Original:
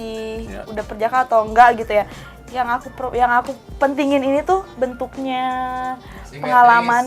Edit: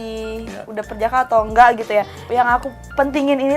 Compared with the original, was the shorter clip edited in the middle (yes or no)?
yes